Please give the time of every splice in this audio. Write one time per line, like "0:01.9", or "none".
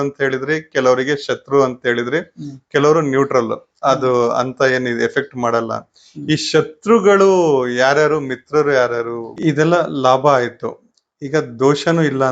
0:09.3